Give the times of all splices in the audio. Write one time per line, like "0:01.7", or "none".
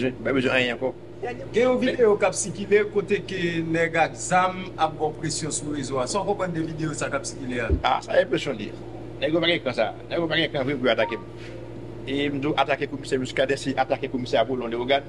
0:01.1